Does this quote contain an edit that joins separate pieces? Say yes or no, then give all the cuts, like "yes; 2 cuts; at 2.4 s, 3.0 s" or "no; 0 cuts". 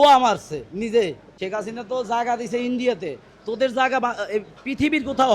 yes; 1 cut; at 1.3 s